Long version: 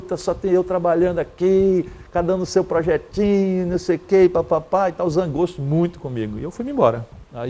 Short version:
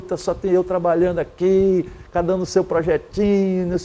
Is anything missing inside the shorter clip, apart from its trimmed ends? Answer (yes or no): no